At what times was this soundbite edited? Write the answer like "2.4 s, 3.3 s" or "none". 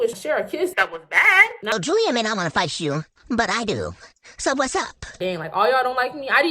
1.7 s, 5.2 s